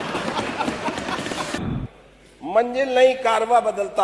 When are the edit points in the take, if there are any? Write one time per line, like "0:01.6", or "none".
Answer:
0:01.6